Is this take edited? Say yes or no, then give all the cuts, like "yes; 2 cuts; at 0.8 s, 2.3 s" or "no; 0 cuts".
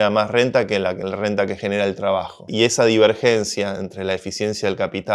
yes; 1 cut; at 2.4 s